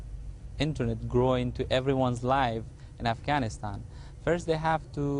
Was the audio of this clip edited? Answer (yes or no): yes